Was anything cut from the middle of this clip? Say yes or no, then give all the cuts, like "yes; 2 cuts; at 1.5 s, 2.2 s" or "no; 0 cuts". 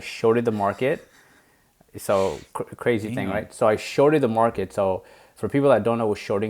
no; 0 cuts